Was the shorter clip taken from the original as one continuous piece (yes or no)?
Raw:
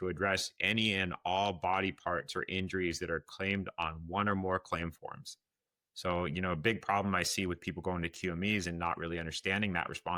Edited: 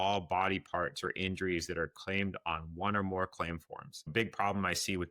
no